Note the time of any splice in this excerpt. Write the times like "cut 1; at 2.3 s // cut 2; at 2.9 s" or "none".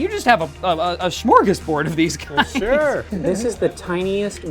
cut 1; at 3.1 s